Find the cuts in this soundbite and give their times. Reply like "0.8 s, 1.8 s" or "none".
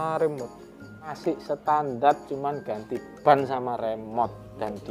1.2 s